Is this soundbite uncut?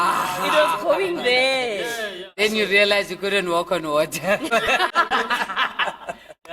yes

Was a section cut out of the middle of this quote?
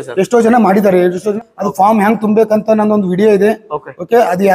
yes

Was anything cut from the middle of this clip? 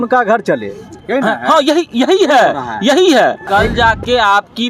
yes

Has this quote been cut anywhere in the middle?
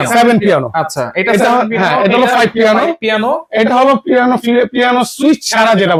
no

